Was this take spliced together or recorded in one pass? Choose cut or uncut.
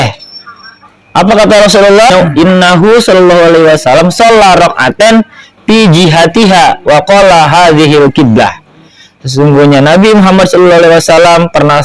cut